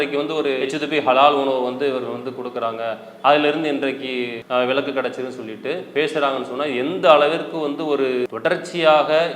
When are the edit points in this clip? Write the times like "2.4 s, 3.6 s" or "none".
5.8 s